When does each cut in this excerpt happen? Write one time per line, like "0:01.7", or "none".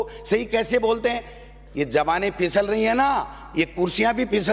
none